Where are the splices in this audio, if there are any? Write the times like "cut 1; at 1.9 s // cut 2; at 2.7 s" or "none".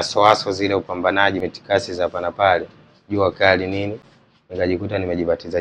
cut 1; at 1.4 s

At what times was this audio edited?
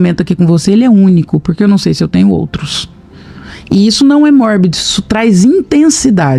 none

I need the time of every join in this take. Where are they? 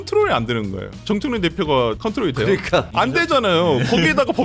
cut 1; at 1.0 s // cut 2; at 2.0 s // cut 3; at 2.9 s

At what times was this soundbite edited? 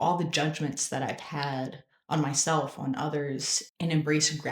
cut 1; at 3.6 s

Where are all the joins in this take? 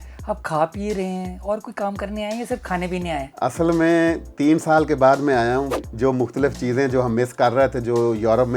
cut 1; at 5.8 s

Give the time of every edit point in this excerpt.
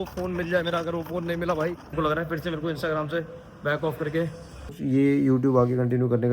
cut 1; at 1.9 s // cut 2; at 4.7 s

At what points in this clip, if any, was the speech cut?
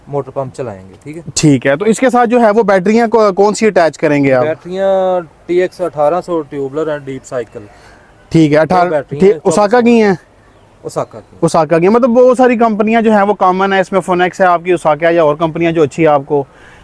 none

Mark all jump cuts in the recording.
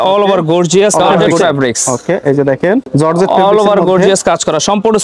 cut 1; at 1.2 s // cut 2; at 2.9 s

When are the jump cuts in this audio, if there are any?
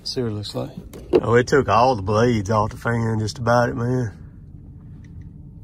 cut 1; at 1.2 s

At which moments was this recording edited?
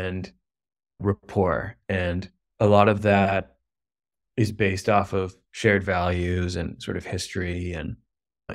none

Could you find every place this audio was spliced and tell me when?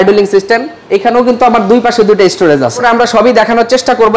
cut 1; at 2.8 s

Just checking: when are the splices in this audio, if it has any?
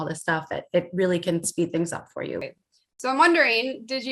cut 1; at 2.4 s

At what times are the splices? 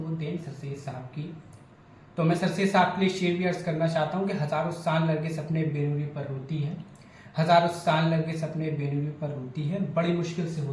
none

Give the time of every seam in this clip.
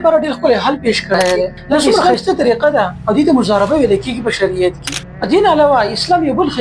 cut 1; at 1.7 s

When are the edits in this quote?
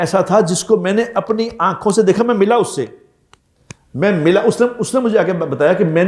none

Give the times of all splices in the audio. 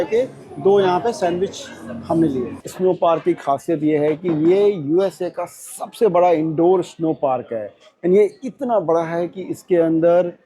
cut 1; at 2.7 s

